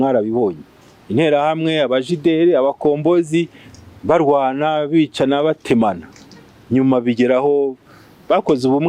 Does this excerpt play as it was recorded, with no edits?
yes; 0 cuts

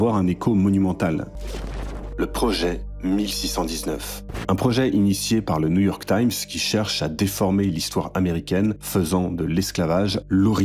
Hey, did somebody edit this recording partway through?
yes; 1 cut; at 1.3 s

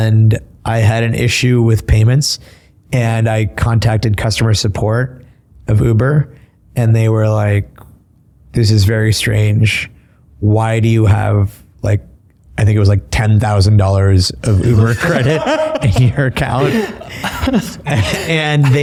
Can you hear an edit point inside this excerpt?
no; 0 cuts

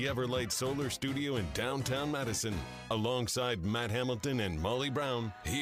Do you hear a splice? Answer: no; 0 cuts

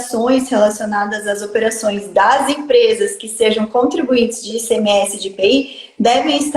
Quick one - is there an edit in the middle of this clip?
no; 0 cuts

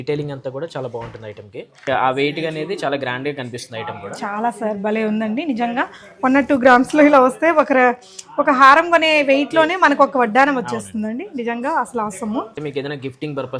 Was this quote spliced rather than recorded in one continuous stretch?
yes; 2 cuts; at 1.8 s, 12.5 s

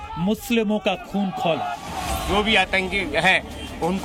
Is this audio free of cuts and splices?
yes; 0 cuts

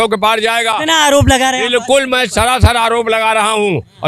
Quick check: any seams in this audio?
no; 0 cuts

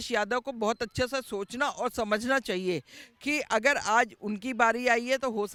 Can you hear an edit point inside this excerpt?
no; 0 cuts

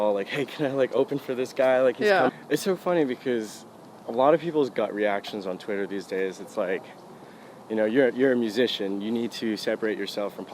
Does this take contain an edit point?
yes; 1 cut; at 2.3 s

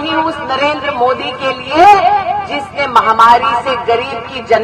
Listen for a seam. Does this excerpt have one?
no; 0 cuts

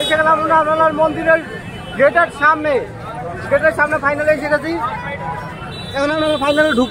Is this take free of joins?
yes; 0 cuts

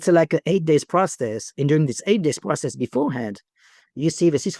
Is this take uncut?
yes; 0 cuts

